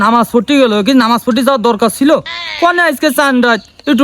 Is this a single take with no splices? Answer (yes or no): yes